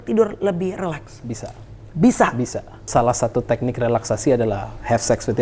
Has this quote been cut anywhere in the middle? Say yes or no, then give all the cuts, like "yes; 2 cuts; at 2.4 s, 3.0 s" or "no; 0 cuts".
yes; 1 cut; at 2.9 s